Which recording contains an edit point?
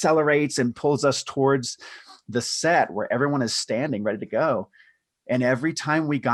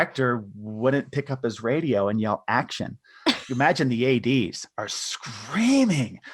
second; 1 cut; at 3.4 s

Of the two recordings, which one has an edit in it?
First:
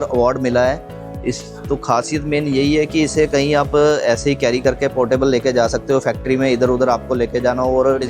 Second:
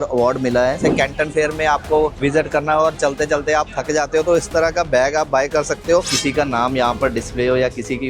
second; 3 cuts; at 0.8 s, 2.2 s, 6.1 s

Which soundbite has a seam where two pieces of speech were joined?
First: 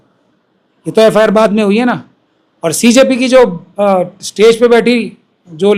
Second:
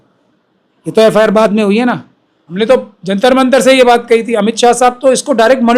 second; 1 cut; at 2.5 s

